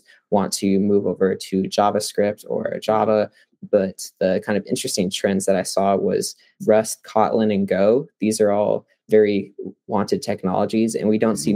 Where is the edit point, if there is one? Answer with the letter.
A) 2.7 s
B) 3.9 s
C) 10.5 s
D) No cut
D